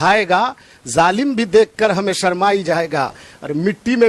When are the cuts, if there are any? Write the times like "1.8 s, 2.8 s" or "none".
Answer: none